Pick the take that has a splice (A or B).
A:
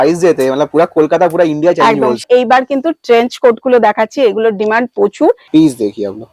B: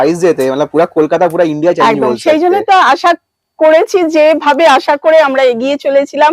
A